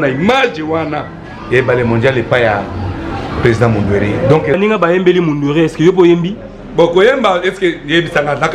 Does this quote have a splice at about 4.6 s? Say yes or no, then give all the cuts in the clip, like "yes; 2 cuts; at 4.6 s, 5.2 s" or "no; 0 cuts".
yes; 1 cut; at 4.6 s